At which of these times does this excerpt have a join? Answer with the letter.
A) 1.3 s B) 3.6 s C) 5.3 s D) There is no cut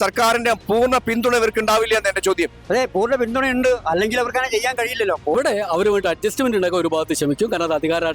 C